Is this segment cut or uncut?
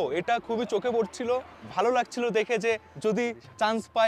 cut